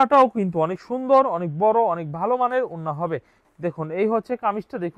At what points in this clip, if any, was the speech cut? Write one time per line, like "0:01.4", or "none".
0:03.4